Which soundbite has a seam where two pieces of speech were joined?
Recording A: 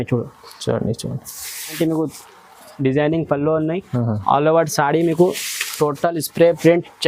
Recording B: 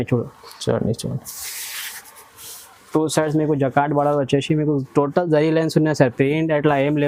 A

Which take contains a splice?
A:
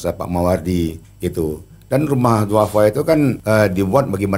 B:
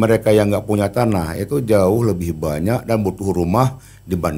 A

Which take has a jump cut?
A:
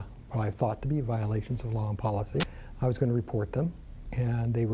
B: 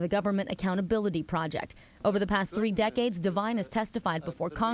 A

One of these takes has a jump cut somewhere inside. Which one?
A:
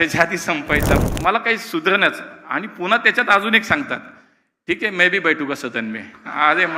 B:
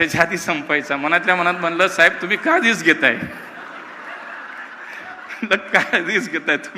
A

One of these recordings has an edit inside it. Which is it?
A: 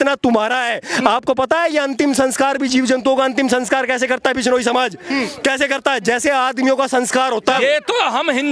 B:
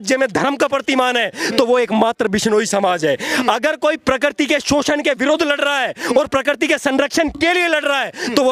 A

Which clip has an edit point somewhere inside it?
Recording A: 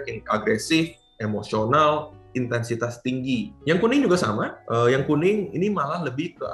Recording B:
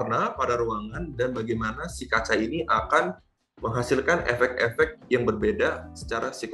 A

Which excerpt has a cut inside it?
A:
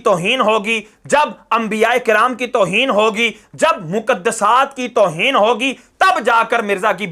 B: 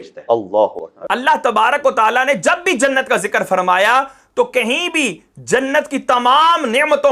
B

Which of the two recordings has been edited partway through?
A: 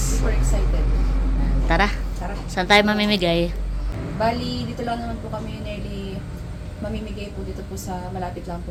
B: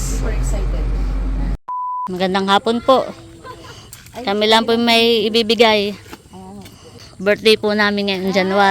B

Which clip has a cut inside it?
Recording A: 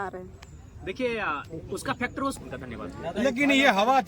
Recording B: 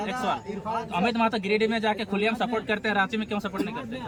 A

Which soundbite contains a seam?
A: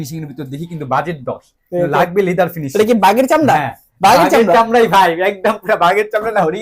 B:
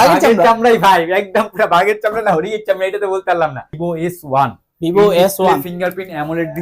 B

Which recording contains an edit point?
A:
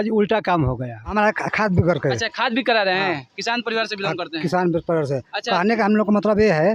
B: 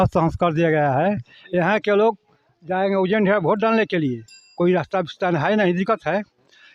A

